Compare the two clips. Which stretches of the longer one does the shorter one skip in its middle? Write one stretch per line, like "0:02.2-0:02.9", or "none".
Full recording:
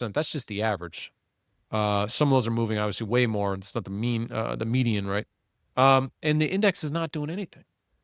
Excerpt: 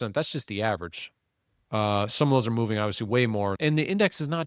0:03.6-0:06.2